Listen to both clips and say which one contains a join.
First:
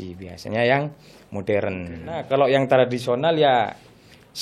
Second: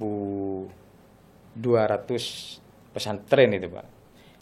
first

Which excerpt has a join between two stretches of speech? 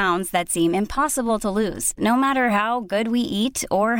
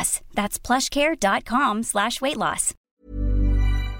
second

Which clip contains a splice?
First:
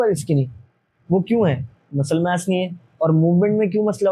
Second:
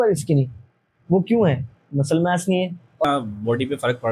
second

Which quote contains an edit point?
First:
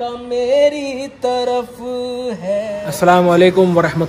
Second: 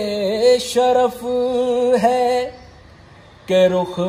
first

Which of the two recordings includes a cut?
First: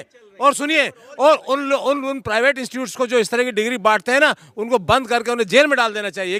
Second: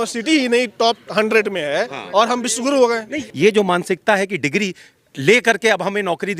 second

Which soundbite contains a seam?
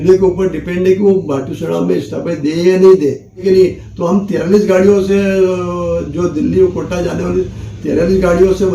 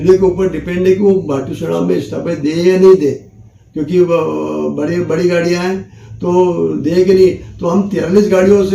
first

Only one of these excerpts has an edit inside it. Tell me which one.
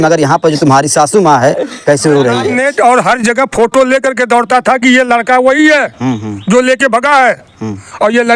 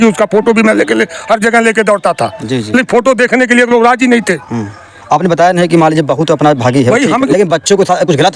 first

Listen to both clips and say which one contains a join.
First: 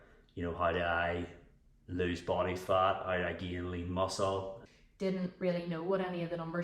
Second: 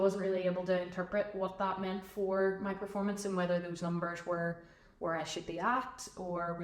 first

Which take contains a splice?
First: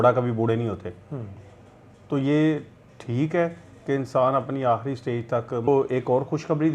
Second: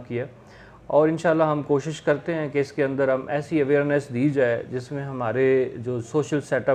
first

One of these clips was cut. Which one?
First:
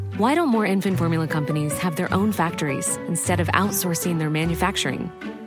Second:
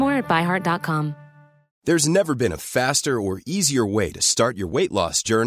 second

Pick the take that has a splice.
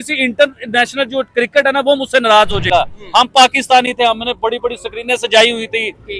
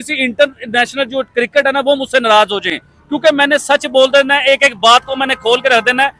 first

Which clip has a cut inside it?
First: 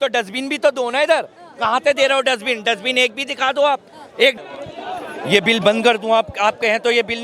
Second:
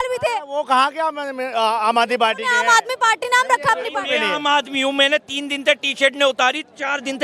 first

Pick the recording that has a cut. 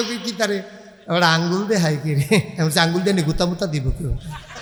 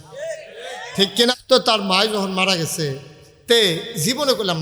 second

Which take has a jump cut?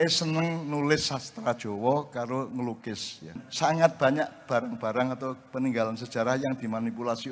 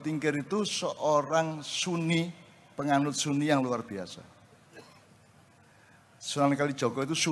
first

